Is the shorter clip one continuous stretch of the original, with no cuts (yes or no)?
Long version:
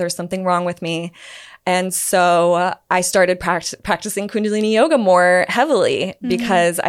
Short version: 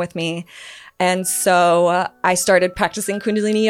no